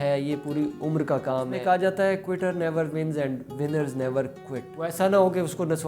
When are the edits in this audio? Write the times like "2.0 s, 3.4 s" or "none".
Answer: 1.6 s, 4.8 s